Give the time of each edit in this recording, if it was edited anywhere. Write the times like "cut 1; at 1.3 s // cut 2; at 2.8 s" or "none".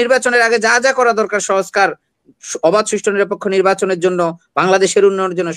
none

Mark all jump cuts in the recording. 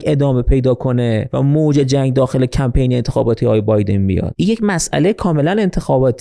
cut 1; at 1.3 s // cut 2; at 4.3 s

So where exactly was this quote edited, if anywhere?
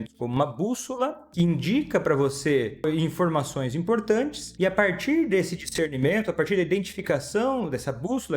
cut 1; at 1.2 s // cut 2; at 2.8 s // cut 3; at 4.4 s

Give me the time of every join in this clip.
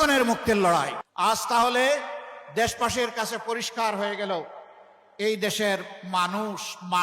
cut 1; at 1.0 s

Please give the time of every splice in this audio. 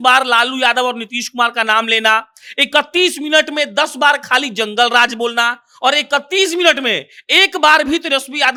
none

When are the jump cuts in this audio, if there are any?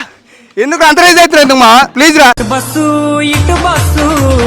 cut 1; at 2.4 s

